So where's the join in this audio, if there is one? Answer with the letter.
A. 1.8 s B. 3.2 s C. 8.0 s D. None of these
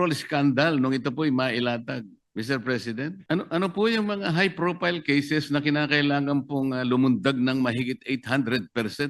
B